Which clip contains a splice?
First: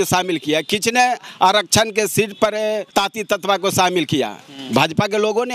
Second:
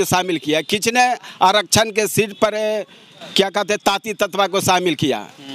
first; 1 cut; at 2.9 s

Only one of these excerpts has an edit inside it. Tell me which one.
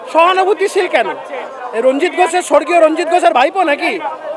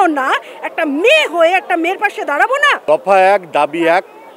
second; 1 cut; at 2.8 s

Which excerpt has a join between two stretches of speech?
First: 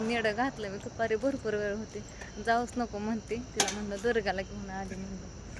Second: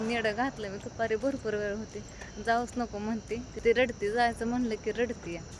second; 1 cut; at 3.5 s

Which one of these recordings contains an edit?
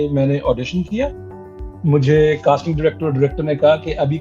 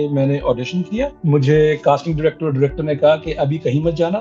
second; 1 cut; at 1.2 s

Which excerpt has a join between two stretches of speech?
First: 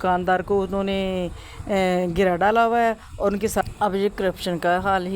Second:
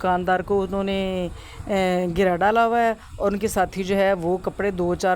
first; 1 cut; at 3.6 s

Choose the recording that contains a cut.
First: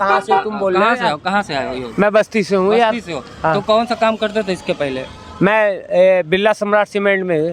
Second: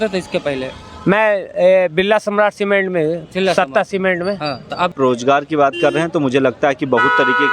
second; 1 cut; at 4.9 s

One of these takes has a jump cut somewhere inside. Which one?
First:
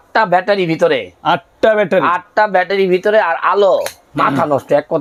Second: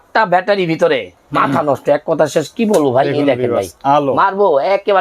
second; 1 cut; at 1.1 s

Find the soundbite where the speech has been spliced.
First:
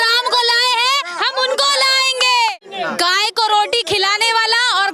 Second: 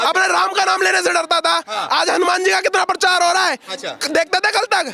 first; 1 cut; at 2.6 s

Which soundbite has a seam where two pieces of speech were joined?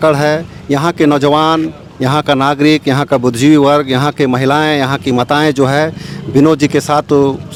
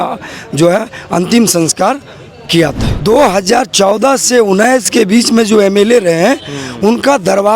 second; 1 cut; at 2.9 s

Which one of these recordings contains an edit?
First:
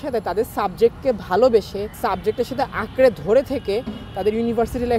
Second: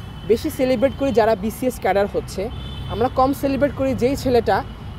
first; 1 cut; at 1.8 s

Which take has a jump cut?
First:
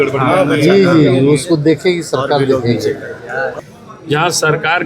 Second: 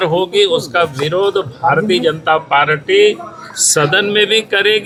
first; 1 cut; at 3.6 s

